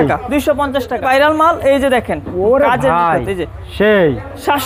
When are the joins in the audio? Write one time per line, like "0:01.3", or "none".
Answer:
0:01.0